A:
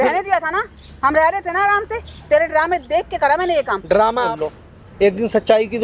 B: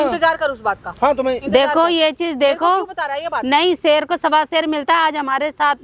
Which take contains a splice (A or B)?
A